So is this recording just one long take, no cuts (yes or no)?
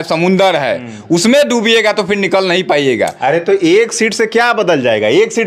yes